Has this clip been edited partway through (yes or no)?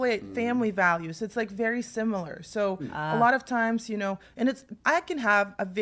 no